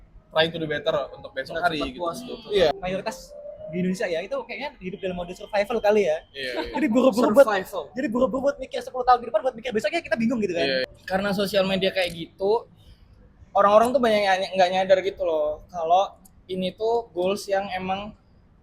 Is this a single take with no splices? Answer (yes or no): no